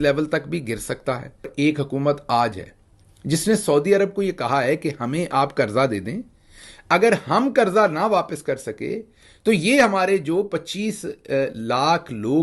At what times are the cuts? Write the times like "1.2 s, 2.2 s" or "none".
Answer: 1.7 s